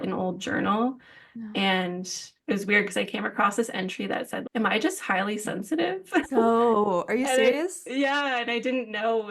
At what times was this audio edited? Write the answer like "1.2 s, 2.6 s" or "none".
2.3 s